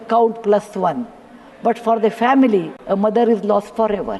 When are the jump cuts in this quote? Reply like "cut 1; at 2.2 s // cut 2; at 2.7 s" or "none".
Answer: cut 1; at 2.8 s

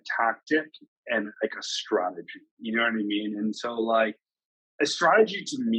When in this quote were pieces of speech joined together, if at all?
none

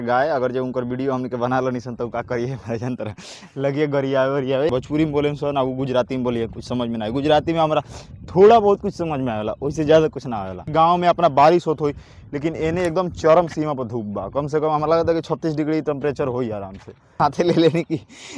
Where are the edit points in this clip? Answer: cut 1; at 4.7 s // cut 2; at 10.7 s // cut 3; at 17.1 s

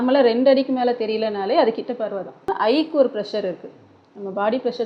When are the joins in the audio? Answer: cut 1; at 2.5 s

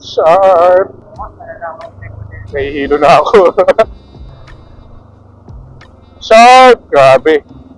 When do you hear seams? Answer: cut 1; at 1.0 s // cut 2; at 4.3 s

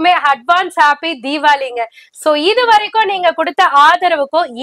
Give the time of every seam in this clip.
none

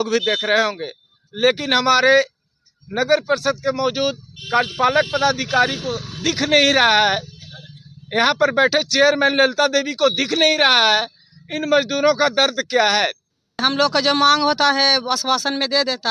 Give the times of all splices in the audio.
cut 1; at 13.6 s

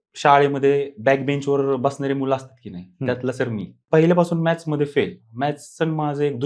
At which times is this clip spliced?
cut 1; at 3.7 s

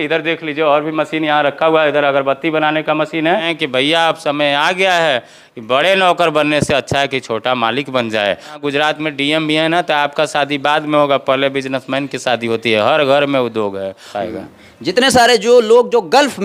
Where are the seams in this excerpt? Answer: cut 1; at 3.5 s // cut 2; at 8.6 s // cut 3; at 14.1 s

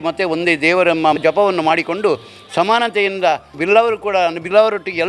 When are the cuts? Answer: cut 1; at 1.2 s // cut 2; at 3.5 s

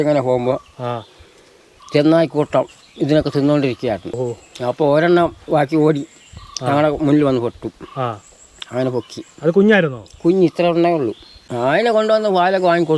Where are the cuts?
cut 1; at 4.2 s // cut 2; at 11.5 s

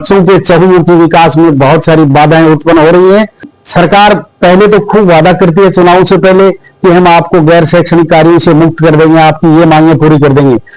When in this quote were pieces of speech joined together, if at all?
cut 1; at 3.5 s

